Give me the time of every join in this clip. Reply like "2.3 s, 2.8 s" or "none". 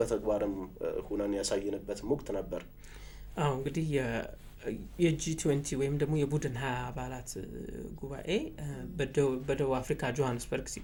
none